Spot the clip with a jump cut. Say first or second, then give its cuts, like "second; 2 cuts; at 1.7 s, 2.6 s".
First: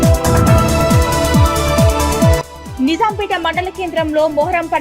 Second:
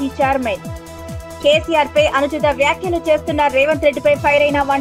first; 1 cut; at 2.4 s